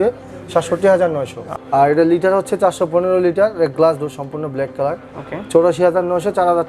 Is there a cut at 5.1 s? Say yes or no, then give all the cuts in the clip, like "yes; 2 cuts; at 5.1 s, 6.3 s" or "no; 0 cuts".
no; 1 cut; at 1.5 s